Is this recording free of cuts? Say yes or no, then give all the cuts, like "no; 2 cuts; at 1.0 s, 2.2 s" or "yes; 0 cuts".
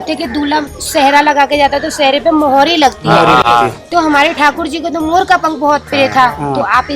yes; 0 cuts